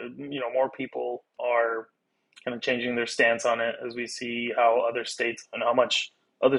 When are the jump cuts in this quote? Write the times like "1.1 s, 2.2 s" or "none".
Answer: 1.4 s

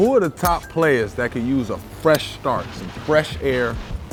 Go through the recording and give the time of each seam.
none

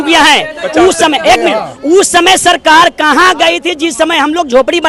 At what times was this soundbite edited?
none

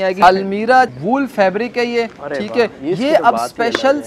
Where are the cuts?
0.9 s

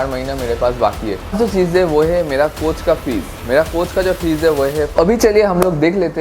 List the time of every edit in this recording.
1.3 s, 4.9 s

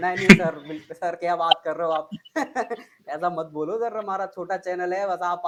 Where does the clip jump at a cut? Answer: none

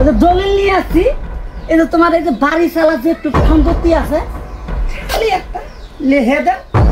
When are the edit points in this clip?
none

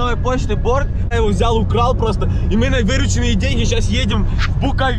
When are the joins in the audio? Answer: 1.1 s

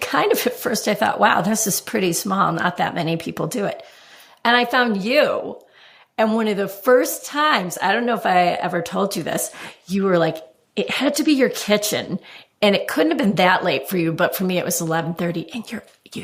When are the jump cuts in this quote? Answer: none

